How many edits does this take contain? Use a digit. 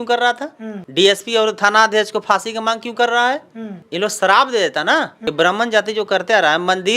1